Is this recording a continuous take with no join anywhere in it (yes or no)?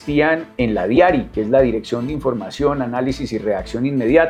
yes